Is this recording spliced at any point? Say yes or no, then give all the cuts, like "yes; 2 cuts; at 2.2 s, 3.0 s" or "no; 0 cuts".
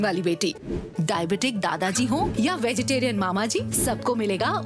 no; 0 cuts